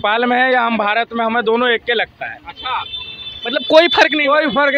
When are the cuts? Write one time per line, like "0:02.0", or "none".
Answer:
none